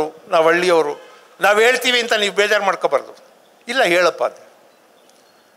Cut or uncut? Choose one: uncut